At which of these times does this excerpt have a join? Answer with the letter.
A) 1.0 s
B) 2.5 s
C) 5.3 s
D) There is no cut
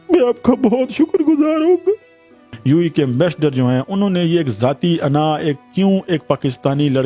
B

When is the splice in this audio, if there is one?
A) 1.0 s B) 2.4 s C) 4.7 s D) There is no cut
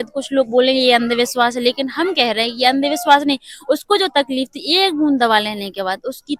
D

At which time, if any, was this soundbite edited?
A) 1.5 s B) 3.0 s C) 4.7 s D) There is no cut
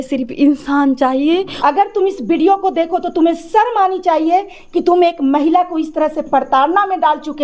A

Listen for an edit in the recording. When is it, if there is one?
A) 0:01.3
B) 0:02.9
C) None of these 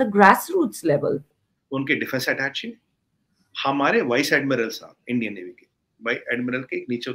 A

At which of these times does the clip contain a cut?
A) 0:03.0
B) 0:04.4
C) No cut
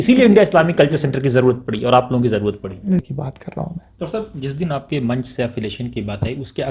A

